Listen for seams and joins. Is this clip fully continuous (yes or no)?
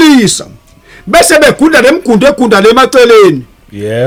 yes